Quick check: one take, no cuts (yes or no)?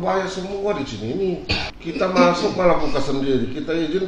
no